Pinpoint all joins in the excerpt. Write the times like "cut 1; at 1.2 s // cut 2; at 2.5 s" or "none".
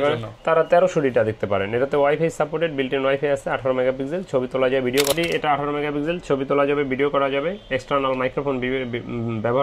cut 1; at 5.1 s